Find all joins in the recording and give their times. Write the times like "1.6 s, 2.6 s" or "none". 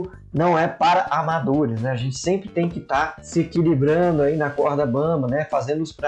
3.2 s